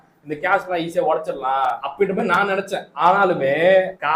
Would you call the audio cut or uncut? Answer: uncut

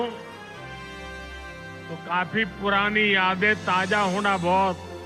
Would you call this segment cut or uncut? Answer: uncut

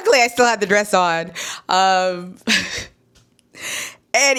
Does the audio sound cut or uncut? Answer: uncut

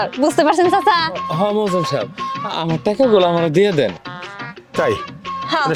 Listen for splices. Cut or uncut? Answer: uncut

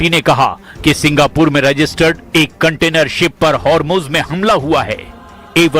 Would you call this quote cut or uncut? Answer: cut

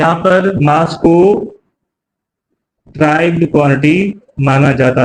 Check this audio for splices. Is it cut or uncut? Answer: uncut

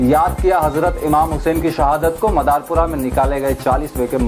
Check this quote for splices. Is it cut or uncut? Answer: uncut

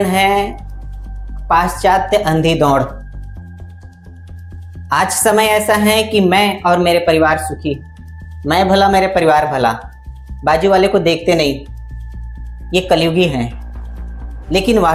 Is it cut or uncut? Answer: uncut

